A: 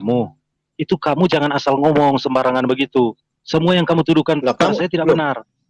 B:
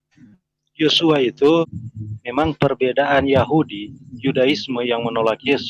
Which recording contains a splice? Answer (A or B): B